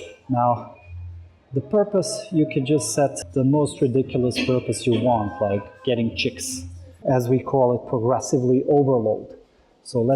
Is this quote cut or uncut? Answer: cut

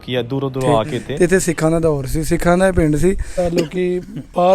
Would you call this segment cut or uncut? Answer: cut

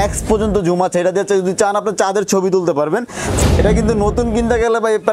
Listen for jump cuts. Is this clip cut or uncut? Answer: cut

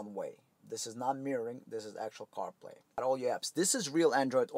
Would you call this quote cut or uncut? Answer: cut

